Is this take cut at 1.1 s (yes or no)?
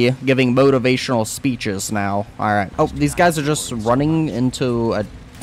no